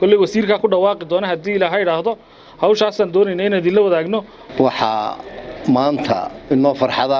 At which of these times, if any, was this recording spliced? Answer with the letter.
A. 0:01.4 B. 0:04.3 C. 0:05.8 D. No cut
D